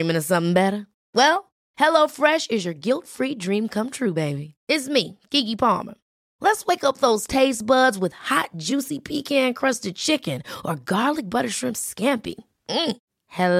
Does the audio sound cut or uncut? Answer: uncut